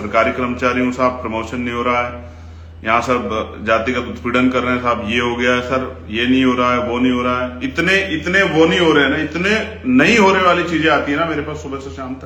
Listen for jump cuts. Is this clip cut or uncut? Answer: uncut